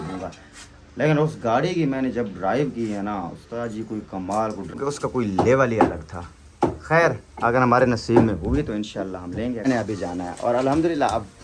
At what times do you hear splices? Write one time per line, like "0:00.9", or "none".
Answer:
0:04.7
0:09.7